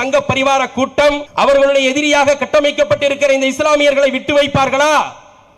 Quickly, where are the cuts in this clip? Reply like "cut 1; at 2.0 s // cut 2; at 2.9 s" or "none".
cut 1; at 1.3 s